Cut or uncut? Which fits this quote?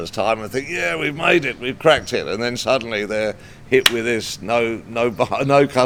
uncut